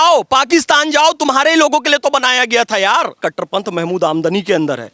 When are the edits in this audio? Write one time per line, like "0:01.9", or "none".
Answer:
0:03.2